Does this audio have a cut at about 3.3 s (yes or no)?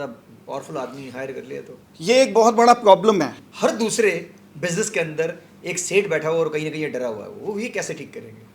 no